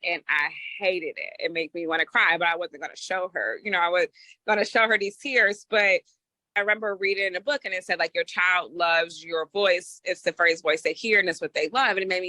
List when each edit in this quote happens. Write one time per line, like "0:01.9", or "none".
0:06.5